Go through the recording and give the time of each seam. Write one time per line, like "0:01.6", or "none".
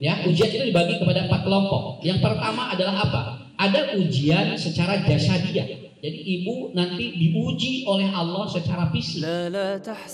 0:09.2